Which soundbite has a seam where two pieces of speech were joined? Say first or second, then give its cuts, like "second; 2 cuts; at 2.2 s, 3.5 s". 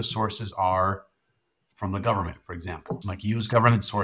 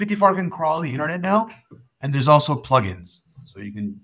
first; 2 cuts; at 1.7 s, 3.1 s